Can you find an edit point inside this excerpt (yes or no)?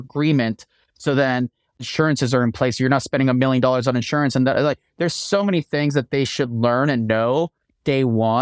no